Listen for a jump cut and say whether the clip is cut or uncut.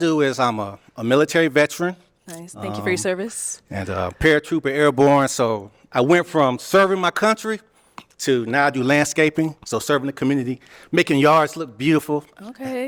uncut